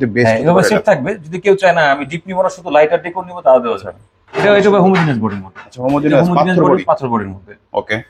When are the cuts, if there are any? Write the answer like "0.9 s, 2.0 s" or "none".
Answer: 4.4 s